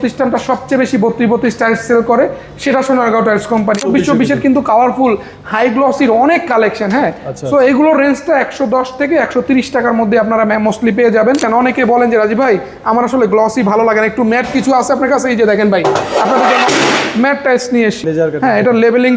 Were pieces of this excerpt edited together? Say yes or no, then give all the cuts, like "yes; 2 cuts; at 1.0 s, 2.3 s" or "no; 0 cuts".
yes; 3 cuts; at 3.8 s, 11.4 s, 18.0 s